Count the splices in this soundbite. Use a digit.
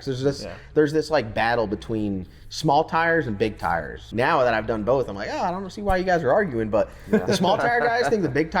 1